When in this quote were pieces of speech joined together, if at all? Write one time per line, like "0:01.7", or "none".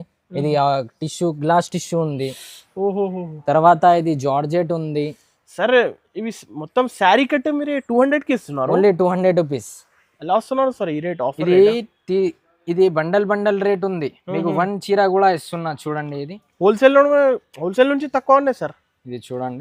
none